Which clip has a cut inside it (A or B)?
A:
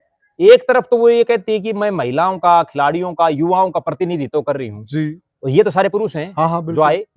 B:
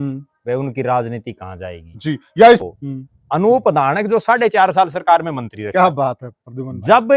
B